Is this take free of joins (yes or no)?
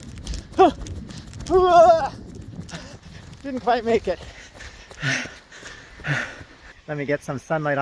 no